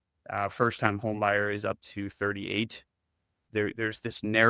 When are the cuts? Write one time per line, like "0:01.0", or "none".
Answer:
0:03.4